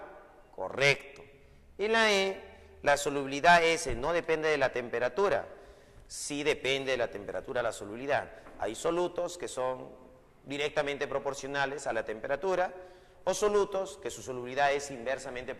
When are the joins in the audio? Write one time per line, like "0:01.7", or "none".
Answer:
0:03.3